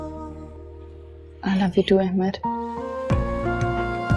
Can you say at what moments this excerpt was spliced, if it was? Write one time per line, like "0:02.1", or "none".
none